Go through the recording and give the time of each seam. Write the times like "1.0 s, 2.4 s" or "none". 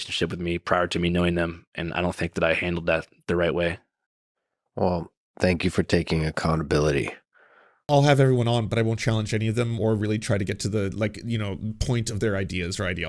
7.9 s